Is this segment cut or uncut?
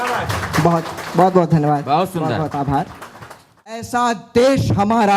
cut